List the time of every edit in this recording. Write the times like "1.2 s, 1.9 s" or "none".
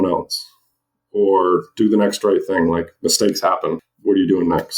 3.9 s